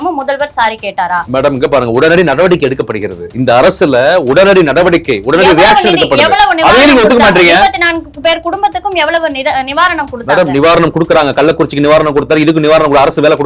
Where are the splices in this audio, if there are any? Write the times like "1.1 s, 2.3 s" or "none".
1.3 s